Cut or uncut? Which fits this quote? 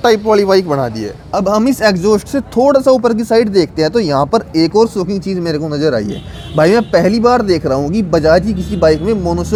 uncut